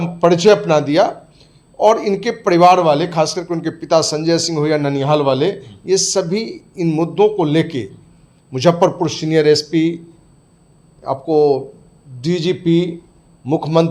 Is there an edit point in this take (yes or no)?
no